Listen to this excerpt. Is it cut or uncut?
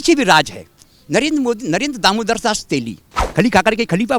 cut